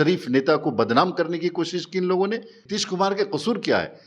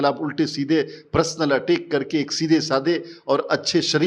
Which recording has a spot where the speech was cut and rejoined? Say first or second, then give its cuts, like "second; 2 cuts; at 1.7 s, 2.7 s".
first; 1 cut; at 2.5 s